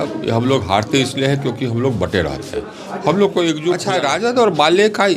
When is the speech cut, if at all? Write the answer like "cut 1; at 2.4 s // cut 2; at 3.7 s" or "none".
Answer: cut 1; at 3.8 s